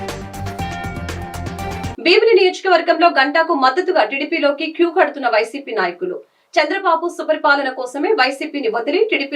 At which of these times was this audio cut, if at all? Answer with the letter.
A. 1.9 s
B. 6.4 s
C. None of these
A